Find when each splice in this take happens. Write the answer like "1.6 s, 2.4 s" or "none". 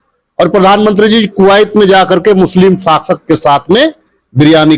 none